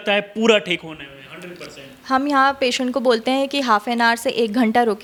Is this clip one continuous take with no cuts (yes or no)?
yes